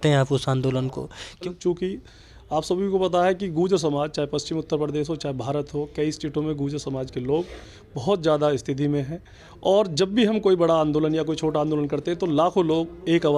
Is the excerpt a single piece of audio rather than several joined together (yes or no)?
no